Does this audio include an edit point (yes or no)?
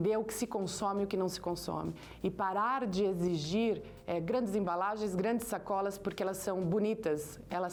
no